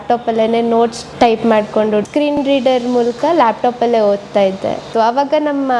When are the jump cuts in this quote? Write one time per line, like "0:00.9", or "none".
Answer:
0:01.0
0:02.4
0:04.8